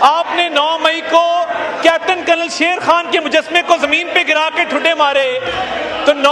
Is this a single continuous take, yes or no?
yes